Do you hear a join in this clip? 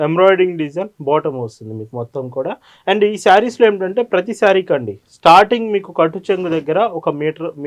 no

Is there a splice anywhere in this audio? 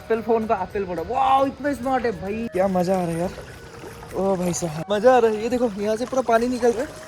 yes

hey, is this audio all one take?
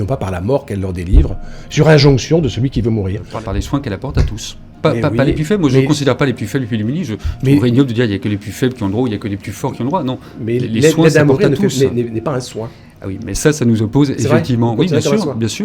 no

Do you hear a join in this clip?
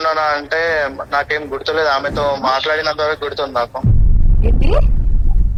no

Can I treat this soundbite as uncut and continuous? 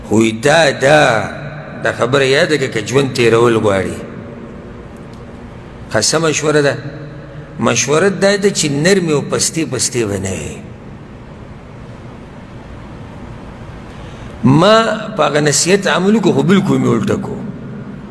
yes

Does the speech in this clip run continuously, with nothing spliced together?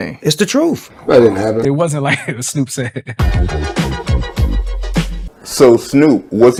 yes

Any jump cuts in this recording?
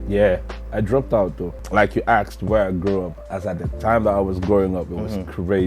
yes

